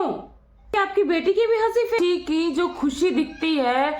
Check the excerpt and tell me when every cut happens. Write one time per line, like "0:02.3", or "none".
0:00.7
0:02.0